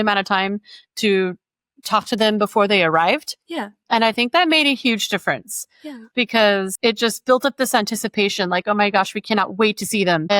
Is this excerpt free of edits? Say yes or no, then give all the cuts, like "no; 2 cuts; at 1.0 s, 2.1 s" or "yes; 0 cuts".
yes; 0 cuts